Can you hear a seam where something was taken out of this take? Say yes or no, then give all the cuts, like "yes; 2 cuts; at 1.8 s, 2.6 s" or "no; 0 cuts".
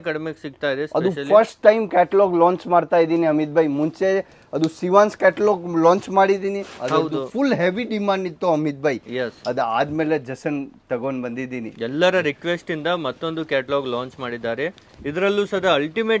no; 0 cuts